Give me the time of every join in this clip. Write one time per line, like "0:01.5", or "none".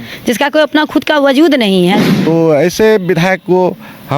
0:02.1